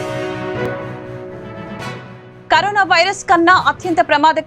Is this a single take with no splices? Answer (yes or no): no